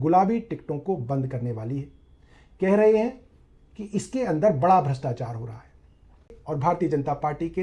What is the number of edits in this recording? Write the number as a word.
one